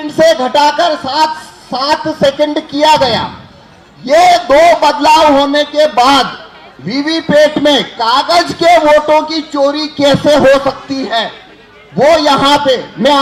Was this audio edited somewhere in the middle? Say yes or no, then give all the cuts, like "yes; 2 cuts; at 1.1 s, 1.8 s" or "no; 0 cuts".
no; 0 cuts